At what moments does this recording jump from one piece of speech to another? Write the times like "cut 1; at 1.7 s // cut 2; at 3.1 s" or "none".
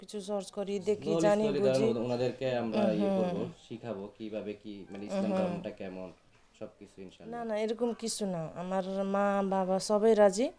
cut 1; at 7.2 s